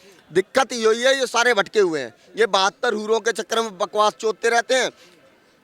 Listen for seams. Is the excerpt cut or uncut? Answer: uncut